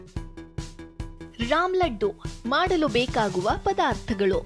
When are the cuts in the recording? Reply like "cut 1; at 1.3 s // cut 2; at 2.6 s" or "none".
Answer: cut 1; at 1.3 s